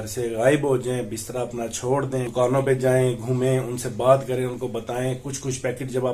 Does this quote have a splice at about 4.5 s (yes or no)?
no